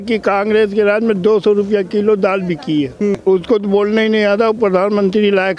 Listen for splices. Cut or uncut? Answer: cut